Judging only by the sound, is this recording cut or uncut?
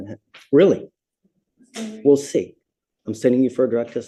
uncut